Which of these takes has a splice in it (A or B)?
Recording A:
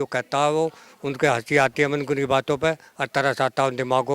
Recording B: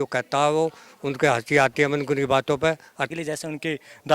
B